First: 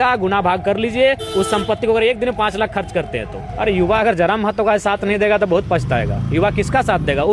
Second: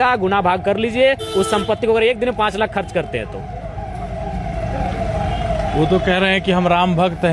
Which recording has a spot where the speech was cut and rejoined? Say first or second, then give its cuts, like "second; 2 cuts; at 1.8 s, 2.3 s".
first; 1 cut; at 3.4 s